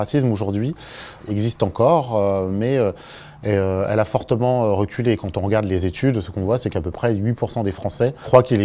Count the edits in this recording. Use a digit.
1